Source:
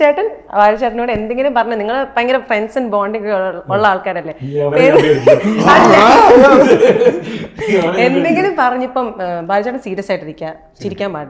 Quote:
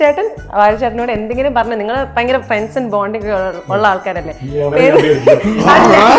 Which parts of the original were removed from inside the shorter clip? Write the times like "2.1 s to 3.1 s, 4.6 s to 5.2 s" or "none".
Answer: none